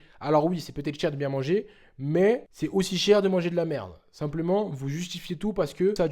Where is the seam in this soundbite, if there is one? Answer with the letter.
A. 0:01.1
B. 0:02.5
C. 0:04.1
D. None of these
B